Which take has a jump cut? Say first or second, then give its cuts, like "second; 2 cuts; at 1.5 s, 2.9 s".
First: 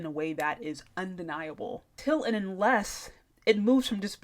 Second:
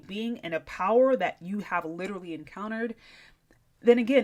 first; 1 cut; at 2.0 s